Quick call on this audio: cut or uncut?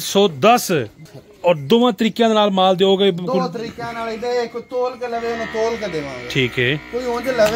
cut